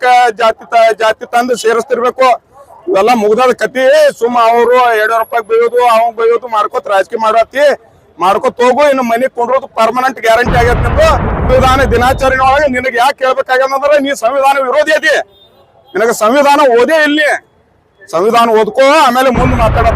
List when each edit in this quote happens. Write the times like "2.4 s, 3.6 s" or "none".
11.5 s